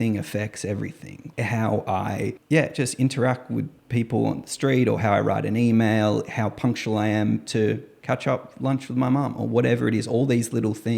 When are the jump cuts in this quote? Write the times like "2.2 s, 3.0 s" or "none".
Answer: 1.2 s, 2.4 s